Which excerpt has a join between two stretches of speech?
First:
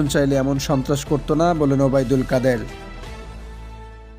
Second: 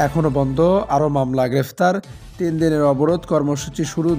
first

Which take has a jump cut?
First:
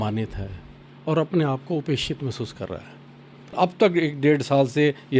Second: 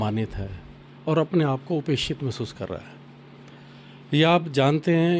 first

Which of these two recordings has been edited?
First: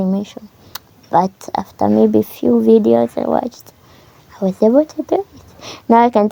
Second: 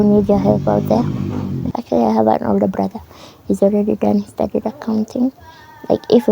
second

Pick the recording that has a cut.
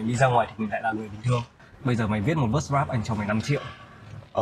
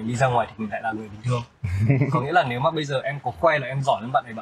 first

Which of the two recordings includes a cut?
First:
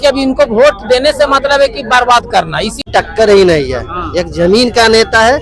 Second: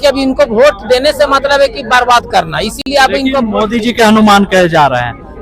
first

